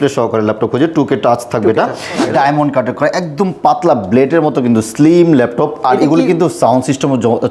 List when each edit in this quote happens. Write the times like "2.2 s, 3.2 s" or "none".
2.2 s